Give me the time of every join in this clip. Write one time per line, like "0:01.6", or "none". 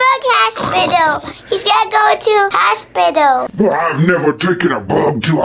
0:02.6